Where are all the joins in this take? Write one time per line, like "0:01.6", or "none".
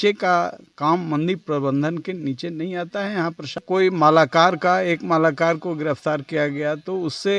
0:03.6